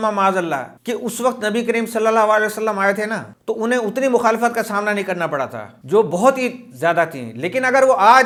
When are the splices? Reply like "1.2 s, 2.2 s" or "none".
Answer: none